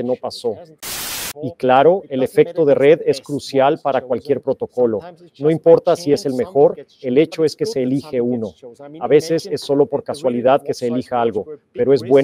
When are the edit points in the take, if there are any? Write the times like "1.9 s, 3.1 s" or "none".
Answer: 1.0 s